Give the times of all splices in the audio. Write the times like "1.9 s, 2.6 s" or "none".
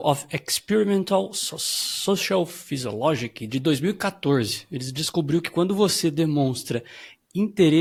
none